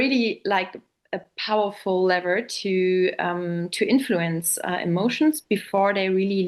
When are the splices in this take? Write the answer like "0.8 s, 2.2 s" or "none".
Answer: none